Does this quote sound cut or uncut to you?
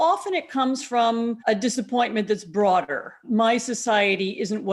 cut